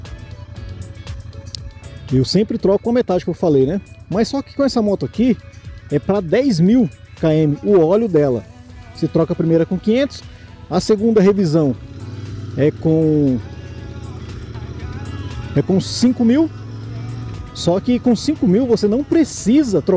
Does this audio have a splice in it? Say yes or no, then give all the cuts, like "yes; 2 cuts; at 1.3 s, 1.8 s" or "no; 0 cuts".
no; 0 cuts